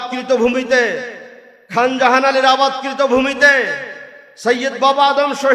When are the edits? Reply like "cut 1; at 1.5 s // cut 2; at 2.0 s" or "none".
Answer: none